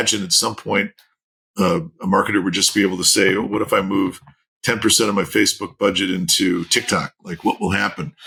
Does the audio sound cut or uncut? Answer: uncut